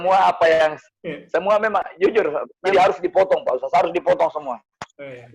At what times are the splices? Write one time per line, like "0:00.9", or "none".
0:02.6